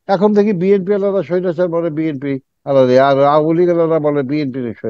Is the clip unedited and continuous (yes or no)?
yes